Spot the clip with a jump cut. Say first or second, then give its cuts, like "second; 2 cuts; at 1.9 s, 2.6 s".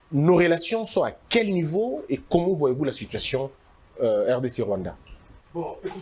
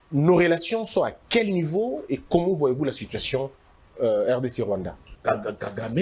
second; 1 cut; at 5.0 s